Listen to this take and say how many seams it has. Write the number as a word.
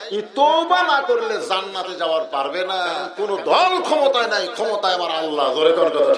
one